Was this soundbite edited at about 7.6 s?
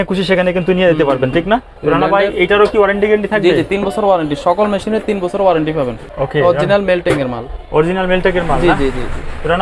no; 2 cuts; at 1.7 s, 6.0 s

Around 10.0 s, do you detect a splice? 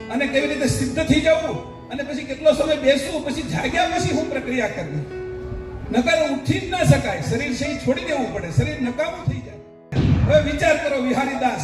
yes; 1 cut; at 10.0 s

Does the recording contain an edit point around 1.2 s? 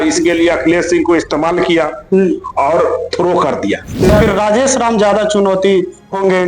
no; 1 cut; at 4.1 s

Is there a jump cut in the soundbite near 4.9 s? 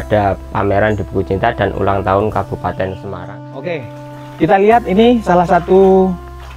no; 1 cut; at 3.1 s

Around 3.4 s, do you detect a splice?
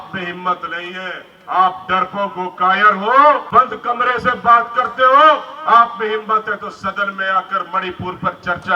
yes; 1 cut; at 3.4 s

